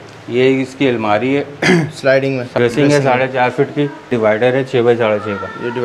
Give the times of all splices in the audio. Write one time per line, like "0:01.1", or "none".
0:02.5
0:04.1

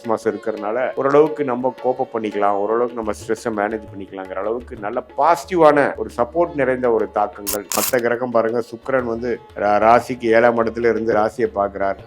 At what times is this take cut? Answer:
0:00.9
0:06.0
0:07.7
0:09.5

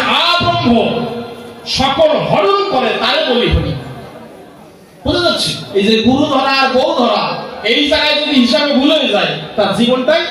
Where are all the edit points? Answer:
0:05.6

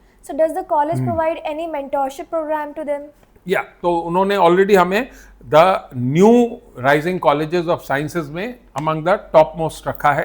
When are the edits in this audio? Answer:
0:03.7

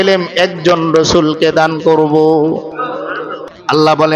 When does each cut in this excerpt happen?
0:03.3

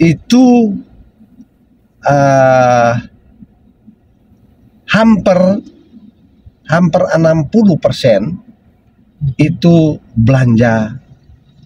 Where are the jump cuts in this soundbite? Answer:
none

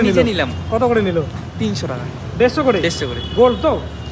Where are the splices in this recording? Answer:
none

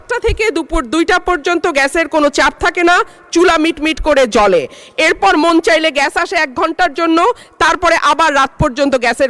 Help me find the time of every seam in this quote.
none

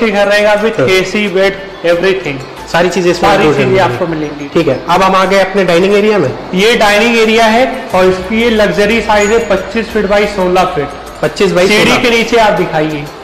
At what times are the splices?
none

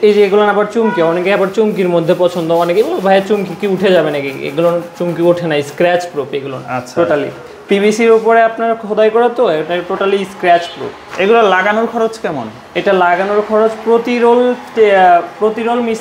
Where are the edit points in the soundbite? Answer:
none

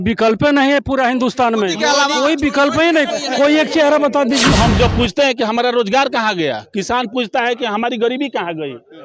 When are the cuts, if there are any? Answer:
0:04.5

